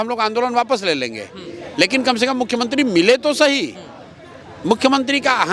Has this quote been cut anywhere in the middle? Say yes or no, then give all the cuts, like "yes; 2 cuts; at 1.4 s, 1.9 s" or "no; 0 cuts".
no; 0 cuts